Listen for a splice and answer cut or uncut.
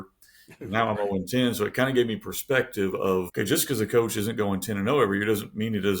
cut